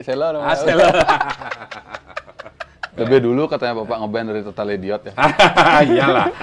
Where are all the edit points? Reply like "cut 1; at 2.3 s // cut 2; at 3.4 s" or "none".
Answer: cut 1; at 2.8 s